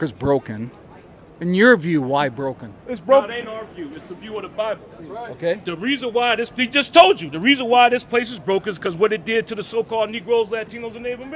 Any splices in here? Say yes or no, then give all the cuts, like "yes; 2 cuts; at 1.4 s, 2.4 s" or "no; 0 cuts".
no; 0 cuts